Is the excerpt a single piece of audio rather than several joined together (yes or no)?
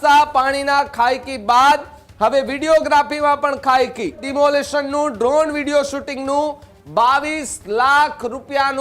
no